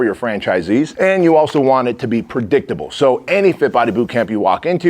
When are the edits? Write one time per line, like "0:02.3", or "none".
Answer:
0:00.9